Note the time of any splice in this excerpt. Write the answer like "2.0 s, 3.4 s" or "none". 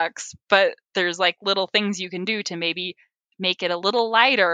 none